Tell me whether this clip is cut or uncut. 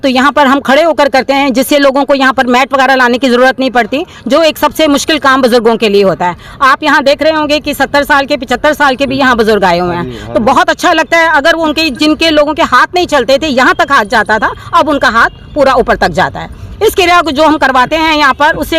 uncut